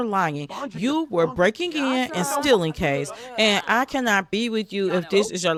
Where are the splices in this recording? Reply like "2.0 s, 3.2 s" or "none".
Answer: none